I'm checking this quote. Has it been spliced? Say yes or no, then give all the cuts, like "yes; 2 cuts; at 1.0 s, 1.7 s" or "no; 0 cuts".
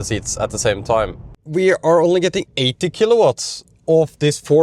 yes; 1 cut; at 1.4 s